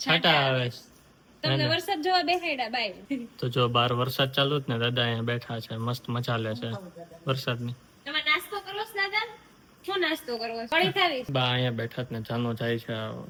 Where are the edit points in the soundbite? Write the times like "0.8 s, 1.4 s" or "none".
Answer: none